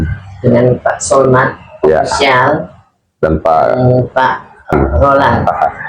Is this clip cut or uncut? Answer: cut